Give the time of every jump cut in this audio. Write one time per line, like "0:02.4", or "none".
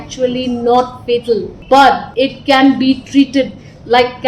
0:01.5
0:02.1